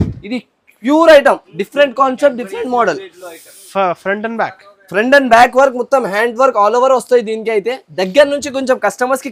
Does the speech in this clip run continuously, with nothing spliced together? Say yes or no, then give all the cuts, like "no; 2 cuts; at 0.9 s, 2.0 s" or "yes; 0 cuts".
yes; 0 cuts